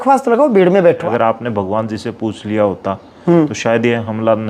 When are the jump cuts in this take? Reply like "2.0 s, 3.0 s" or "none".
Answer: 1.0 s